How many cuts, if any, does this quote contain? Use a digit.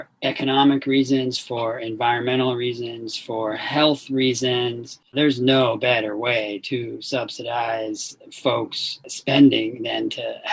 2